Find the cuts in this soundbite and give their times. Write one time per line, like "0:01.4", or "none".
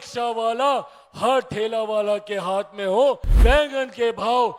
0:03.3